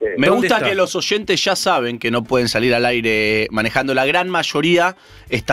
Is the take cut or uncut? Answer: cut